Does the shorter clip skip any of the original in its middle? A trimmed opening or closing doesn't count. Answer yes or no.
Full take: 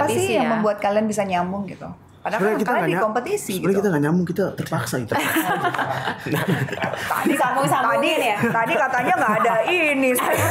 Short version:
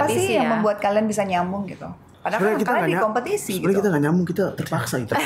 no